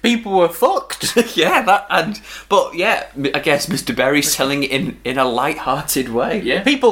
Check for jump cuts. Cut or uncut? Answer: uncut